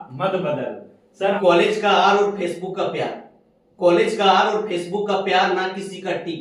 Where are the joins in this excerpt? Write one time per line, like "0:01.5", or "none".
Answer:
0:01.4